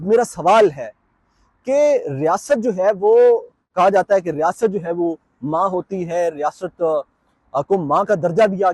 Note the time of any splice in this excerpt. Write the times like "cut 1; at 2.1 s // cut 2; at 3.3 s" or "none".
none